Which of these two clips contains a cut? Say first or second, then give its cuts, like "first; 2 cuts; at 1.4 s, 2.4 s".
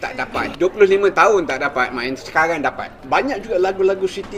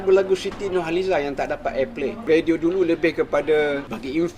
second; 1 cut; at 2.2 s